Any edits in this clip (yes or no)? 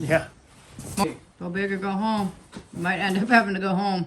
yes